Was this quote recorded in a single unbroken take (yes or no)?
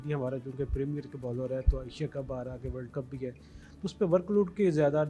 yes